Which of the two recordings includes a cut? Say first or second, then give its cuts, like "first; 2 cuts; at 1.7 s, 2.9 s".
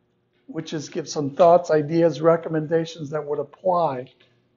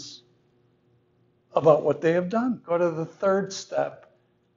second; 1 cut; at 2.6 s